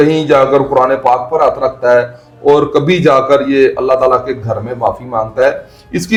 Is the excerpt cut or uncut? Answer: uncut